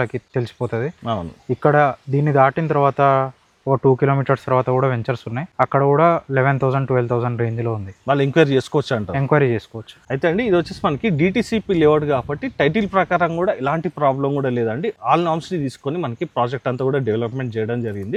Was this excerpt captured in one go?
yes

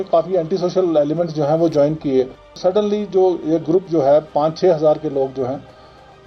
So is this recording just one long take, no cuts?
no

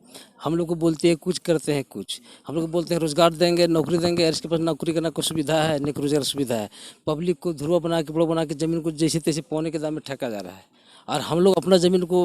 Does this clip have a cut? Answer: no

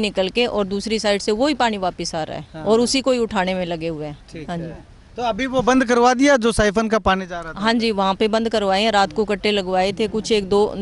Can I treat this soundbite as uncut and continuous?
yes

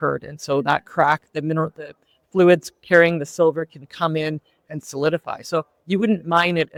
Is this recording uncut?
yes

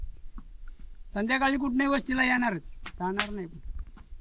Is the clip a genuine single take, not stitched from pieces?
yes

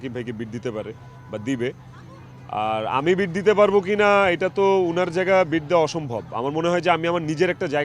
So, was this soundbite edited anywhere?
no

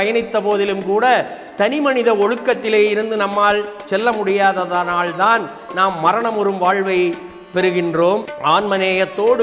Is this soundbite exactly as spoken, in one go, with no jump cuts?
no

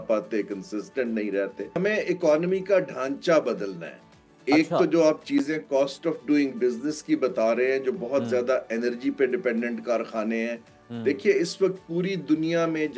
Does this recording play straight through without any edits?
no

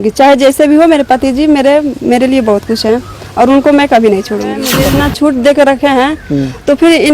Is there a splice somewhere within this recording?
yes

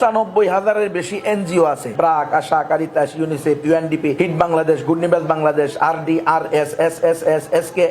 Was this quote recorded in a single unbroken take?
no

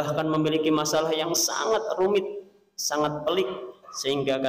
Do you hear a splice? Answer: no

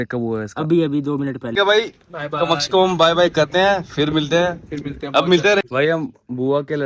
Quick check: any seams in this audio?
yes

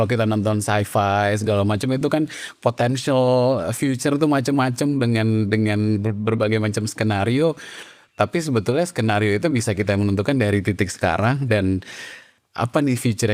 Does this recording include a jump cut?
no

